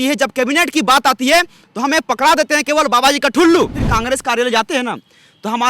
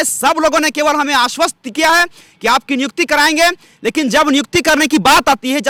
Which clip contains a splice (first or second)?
first